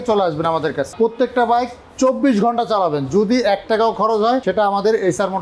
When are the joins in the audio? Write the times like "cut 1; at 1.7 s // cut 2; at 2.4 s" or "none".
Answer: cut 1; at 0.9 s // cut 2; at 4.4 s